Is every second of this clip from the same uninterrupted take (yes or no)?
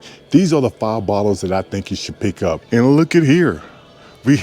no